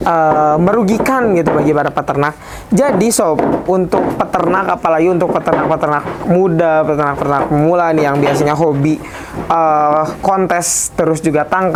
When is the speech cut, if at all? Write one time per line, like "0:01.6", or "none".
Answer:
none